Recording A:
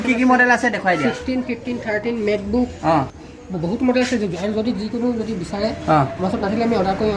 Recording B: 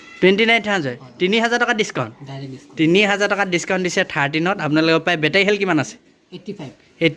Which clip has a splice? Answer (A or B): A